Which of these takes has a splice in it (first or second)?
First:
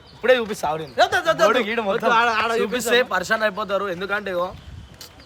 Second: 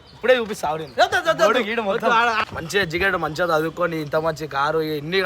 second